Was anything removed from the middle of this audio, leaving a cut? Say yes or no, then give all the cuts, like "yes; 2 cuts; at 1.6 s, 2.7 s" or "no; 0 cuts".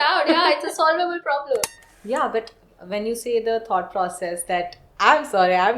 yes; 1 cut; at 1.7 s